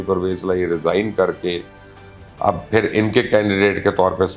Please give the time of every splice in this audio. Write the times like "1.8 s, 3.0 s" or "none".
none